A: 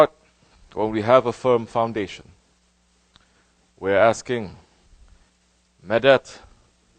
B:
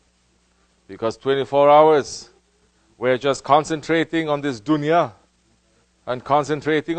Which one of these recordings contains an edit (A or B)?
A